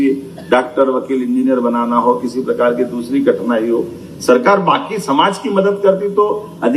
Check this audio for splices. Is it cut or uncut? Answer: uncut